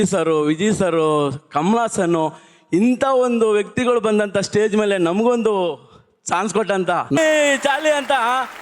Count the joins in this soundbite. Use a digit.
1